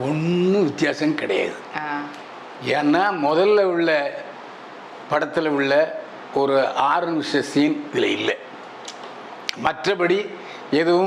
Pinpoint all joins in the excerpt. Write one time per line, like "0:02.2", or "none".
none